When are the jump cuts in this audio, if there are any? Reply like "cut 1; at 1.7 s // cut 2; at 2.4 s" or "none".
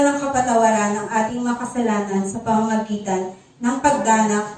none